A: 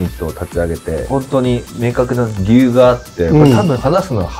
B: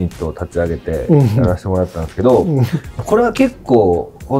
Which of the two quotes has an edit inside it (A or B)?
A